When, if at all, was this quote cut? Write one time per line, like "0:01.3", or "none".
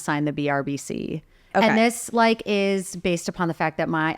0:01.5